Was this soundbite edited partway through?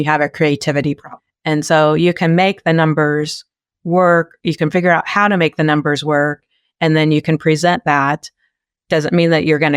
yes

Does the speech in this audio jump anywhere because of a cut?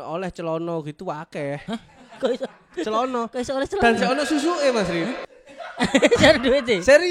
no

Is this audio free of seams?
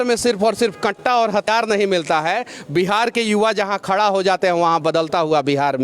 no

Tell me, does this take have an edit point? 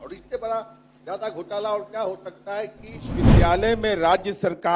yes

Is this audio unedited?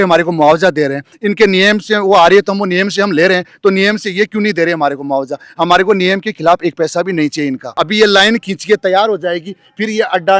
no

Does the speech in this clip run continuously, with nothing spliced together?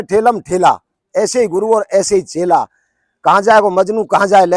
yes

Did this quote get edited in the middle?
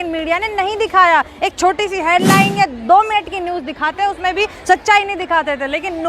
no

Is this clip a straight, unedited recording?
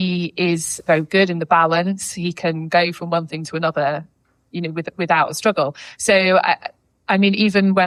yes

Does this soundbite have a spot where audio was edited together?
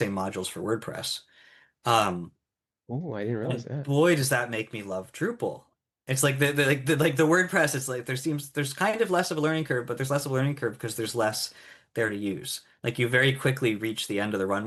no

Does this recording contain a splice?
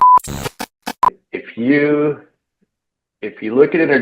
yes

